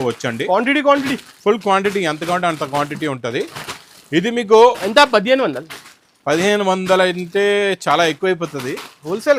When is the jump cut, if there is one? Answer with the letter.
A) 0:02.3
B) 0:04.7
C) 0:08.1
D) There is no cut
D